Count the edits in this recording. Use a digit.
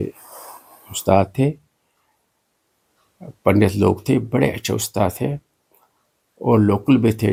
0